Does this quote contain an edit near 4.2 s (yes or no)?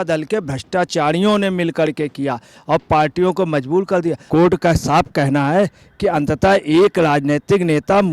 yes